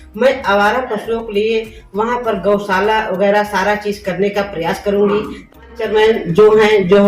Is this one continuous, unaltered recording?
no; 1 cut; at 5.8 s

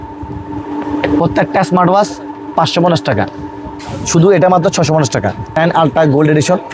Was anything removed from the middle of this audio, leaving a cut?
yes; 1 cut; at 5.6 s

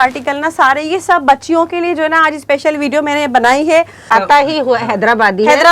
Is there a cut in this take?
yes; 1 cut; at 4.1 s

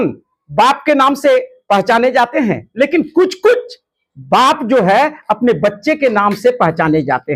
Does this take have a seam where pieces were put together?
no; 0 cuts

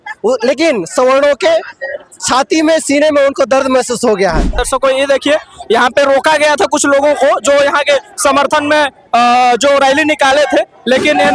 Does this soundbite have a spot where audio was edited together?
yes; 1 cut; at 4.6 s

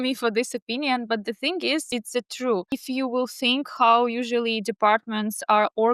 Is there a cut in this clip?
yes; 2 cuts; at 1.9 s, 2.8 s

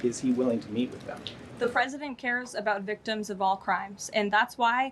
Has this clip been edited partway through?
no; 0 cuts

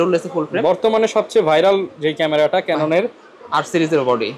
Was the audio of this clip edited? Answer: no; 0 cuts

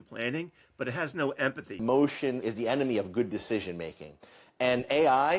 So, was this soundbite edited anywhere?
yes; 2 cuts; at 1.8 s, 2.4 s

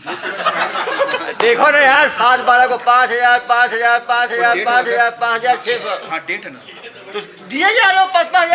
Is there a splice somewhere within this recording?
no; 0 cuts

